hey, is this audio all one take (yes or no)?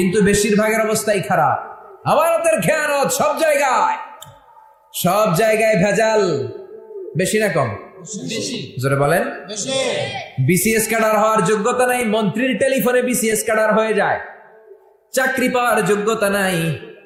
yes